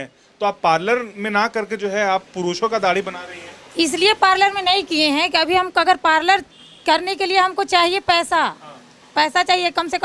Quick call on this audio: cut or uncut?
uncut